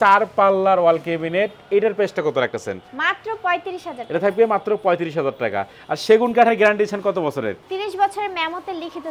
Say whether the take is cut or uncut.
uncut